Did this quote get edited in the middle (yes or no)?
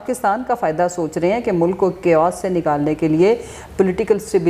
no